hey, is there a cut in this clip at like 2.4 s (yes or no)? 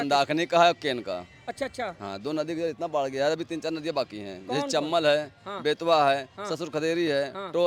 no